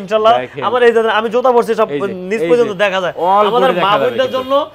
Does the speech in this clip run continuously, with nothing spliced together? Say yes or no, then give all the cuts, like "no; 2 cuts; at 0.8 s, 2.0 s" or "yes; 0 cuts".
yes; 0 cuts